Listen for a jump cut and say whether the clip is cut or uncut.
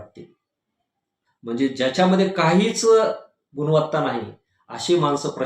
cut